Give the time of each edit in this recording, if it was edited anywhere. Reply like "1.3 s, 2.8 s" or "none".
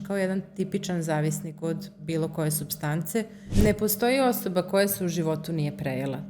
3.5 s